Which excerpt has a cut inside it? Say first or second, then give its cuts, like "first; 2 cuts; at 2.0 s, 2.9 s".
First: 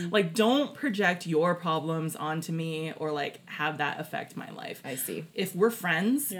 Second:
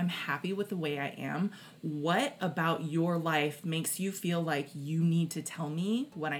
first; 1 cut; at 5.3 s